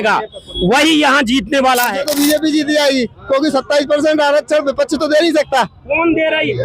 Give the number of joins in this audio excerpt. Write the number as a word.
one